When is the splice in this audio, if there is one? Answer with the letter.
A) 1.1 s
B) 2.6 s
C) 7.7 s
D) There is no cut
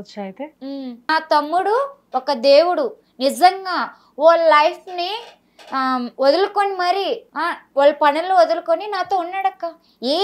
A